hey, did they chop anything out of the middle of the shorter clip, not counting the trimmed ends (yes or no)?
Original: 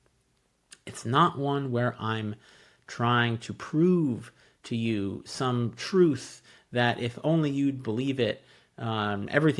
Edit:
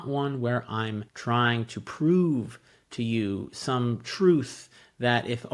yes